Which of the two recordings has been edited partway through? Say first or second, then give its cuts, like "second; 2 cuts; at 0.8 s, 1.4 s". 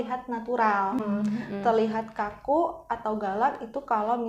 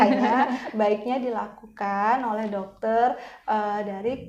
first; 1 cut; at 1.0 s